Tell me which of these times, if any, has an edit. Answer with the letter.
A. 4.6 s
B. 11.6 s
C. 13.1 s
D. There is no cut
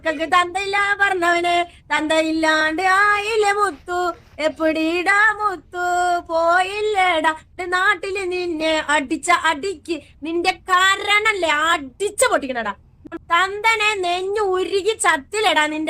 C